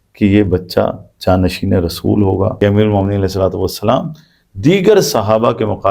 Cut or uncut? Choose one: cut